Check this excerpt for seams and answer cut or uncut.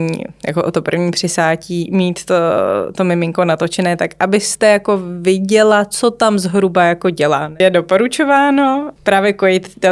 cut